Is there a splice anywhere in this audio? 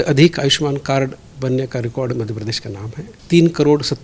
yes; 1 cut; at 3.1 s

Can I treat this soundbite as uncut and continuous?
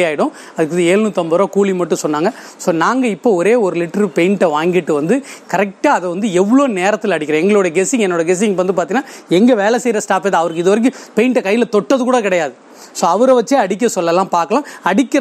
yes; 0 cuts

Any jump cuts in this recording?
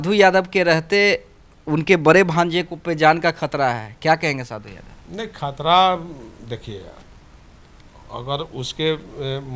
no; 0 cuts

